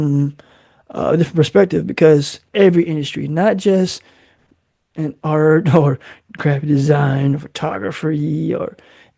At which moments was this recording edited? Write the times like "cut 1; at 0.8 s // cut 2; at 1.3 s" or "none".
cut 1; at 2.4 s

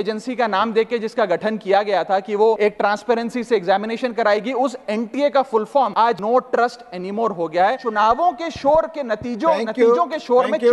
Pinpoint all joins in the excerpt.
cut 1; at 2.6 s // cut 2; at 6.1 s // cut 3; at 7.8 s

